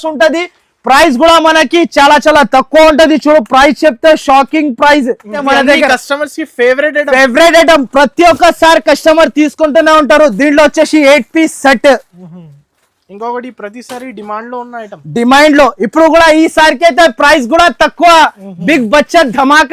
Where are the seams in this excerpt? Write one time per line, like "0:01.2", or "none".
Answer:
0:05.4